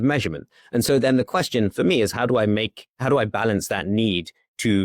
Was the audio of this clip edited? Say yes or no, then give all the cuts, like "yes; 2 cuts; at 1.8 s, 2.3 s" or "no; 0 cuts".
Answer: no; 0 cuts